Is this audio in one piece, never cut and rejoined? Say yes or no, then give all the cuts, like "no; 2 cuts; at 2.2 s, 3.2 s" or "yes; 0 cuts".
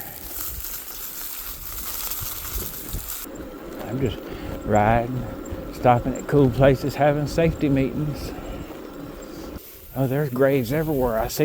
no; 2 cuts; at 3.2 s, 9.6 s